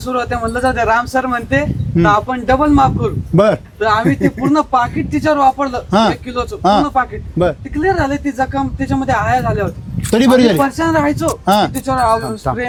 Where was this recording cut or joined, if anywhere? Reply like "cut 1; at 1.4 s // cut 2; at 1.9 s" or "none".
none